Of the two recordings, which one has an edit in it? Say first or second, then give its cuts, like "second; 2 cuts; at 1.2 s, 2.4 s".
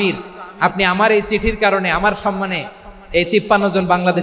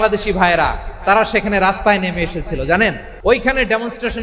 second; 1 cut; at 3.1 s